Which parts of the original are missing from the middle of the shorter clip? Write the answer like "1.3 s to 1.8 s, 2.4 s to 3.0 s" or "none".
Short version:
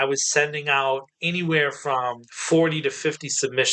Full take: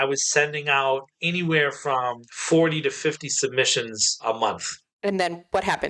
none